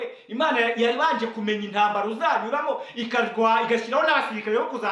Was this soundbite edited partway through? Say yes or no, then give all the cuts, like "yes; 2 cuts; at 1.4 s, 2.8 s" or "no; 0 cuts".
no; 0 cuts